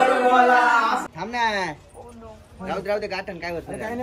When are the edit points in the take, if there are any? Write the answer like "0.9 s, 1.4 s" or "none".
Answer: 1.1 s